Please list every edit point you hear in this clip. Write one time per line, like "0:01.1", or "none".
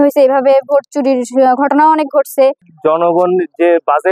0:02.7